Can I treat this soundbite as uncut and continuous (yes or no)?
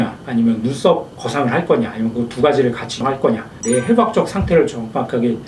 yes